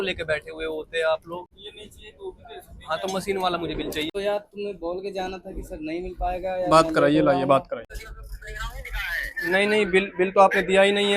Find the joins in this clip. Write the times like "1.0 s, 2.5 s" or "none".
1.5 s, 4.1 s, 7.9 s